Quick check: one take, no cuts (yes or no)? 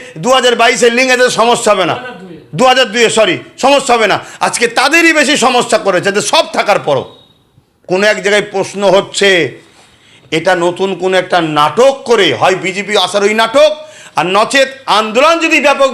yes